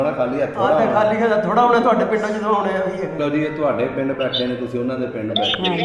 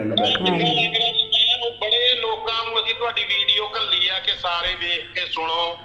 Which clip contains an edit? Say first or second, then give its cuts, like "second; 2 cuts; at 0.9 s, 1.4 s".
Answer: first; 1 cut; at 3.1 s